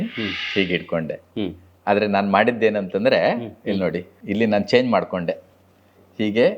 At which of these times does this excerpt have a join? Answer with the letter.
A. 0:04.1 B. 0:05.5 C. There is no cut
A